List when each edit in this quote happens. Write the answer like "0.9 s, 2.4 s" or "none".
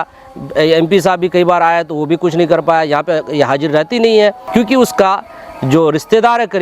4.4 s